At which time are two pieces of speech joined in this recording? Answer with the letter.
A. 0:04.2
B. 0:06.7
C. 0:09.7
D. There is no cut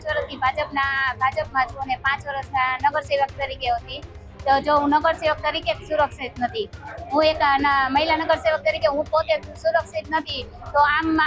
D